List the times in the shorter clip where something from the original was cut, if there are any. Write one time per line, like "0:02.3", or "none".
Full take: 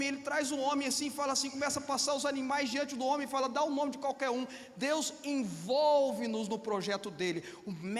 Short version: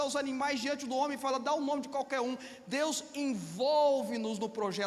none